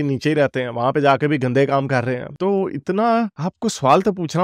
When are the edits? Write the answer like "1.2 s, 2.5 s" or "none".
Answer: none